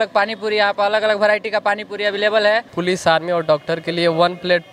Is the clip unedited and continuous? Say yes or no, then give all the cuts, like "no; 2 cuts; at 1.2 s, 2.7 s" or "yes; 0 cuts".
no; 1 cut; at 2.7 s